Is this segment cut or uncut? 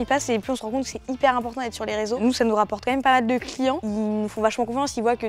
uncut